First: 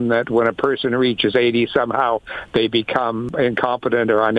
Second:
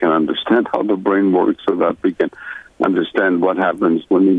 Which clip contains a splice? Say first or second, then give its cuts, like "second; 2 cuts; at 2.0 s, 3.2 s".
first; 1 cut; at 3.3 s